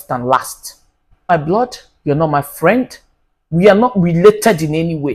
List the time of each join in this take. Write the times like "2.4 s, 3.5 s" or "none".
1.3 s